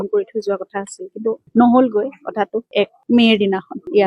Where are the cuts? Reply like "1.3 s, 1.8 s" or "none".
2.6 s